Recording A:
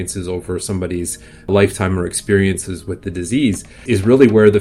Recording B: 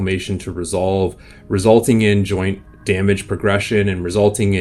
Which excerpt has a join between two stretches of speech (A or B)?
A